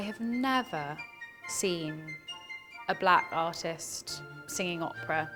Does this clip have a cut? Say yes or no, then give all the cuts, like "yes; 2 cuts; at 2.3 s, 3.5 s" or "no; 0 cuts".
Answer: no; 0 cuts